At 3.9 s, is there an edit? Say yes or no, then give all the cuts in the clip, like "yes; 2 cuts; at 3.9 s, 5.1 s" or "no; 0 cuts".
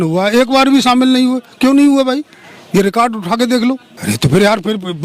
yes; 1 cut; at 3.9 s